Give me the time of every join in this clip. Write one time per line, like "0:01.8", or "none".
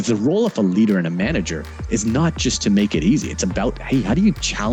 none